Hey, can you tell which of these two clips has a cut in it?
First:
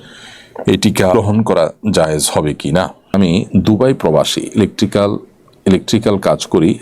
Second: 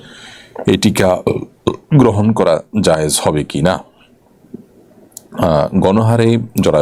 first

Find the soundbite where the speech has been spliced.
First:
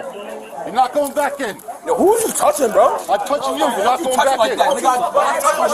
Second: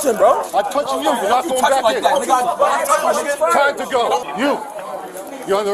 second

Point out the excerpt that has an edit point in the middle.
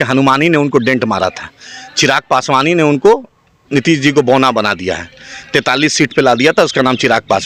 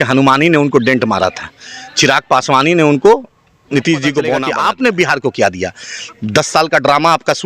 second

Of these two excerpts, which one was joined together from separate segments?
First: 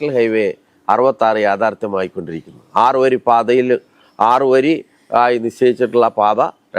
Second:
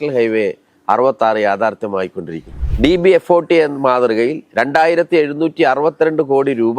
second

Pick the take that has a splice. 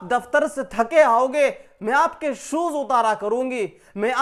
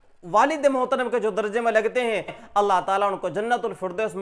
second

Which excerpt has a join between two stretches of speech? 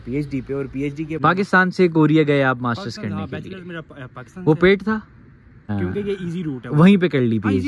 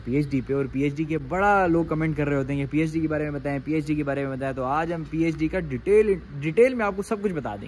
first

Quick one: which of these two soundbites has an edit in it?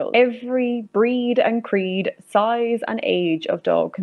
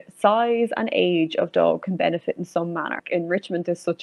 second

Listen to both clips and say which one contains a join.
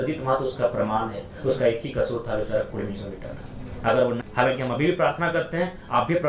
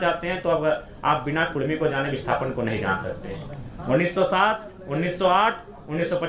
first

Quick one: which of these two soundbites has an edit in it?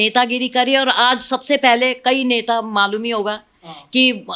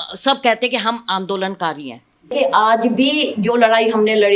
second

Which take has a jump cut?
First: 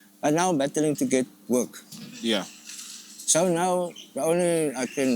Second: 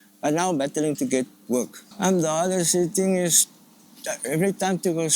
second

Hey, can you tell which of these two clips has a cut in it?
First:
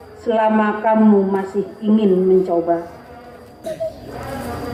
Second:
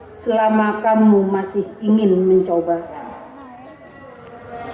second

